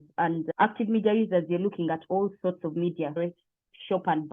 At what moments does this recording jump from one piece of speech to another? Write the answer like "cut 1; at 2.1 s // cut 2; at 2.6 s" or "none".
cut 1; at 3.2 s